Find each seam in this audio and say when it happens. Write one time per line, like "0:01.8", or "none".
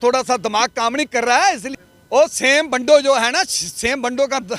0:01.7